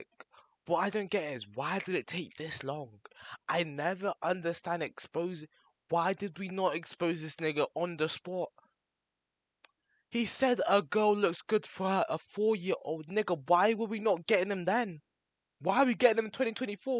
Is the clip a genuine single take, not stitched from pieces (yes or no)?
yes